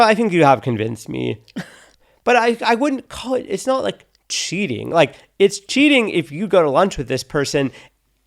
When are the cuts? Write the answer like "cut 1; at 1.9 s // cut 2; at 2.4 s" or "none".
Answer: cut 1; at 1.8 s